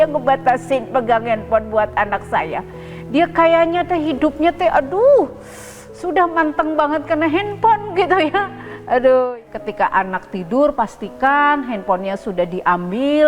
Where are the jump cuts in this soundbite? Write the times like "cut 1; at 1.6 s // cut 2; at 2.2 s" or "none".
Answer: cut 1; at 9.3 s